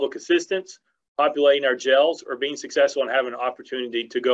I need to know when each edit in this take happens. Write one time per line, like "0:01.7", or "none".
none